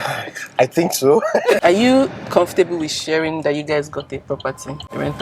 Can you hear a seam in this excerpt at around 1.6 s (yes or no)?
yes